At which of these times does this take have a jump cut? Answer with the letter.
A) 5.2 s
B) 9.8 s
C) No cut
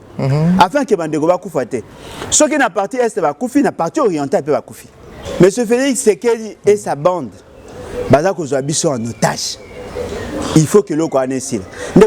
A